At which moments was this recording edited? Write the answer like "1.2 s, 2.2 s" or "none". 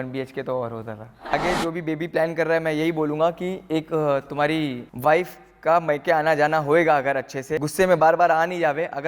1.3 s, 4.8 s, 7.6 s